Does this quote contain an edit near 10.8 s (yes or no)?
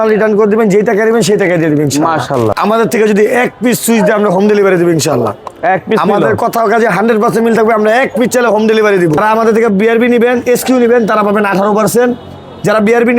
no